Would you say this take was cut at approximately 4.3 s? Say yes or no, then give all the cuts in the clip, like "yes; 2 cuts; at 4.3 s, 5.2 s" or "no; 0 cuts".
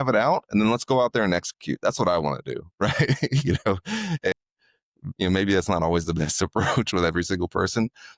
yes; 1 cut; at 4.3 s